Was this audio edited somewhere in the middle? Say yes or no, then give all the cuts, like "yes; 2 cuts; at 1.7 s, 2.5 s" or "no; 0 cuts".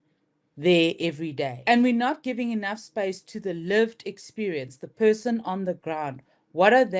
yes; 1 cut; at 1.5 s